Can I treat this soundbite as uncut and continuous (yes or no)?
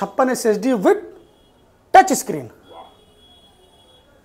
yes